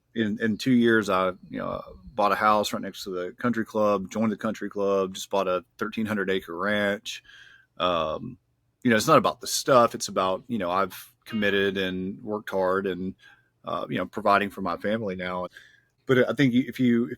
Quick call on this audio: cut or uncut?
cut